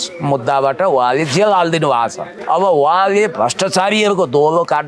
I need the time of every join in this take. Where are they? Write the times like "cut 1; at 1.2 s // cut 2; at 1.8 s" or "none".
cut 1; at 2.3 s